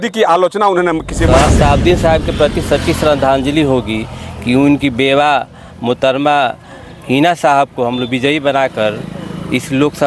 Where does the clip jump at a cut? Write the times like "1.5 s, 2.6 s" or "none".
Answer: 1.3 s

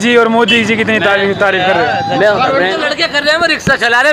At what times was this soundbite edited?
2.8 s

